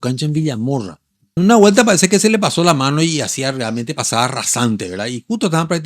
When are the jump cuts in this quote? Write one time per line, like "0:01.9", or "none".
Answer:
0:01.4